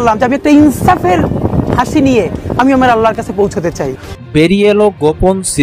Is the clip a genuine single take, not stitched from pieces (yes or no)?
no